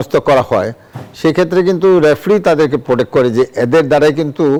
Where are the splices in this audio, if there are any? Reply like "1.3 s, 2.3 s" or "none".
none